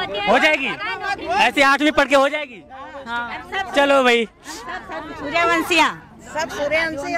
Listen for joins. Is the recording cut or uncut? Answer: uncut